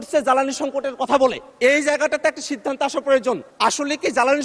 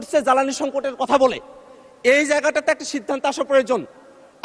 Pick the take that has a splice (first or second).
first